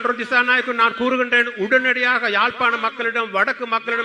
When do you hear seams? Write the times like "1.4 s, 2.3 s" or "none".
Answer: none